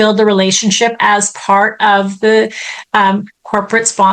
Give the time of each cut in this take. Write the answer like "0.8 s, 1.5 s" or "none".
none